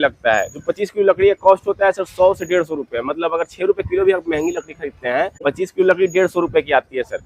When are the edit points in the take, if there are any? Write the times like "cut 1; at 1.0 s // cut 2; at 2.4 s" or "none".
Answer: cut 1; at 5.4 s